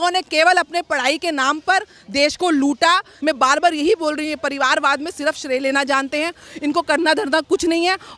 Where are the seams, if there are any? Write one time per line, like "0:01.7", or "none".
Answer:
0:03.1